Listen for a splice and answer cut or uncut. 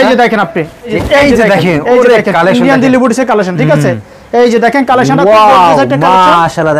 cut